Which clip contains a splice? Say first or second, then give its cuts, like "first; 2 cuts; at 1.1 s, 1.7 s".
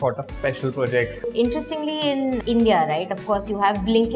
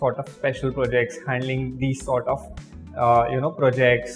first; 1 cut; at 1.2 s